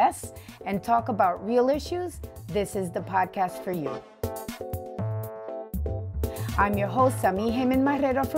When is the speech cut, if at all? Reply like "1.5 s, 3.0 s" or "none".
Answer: none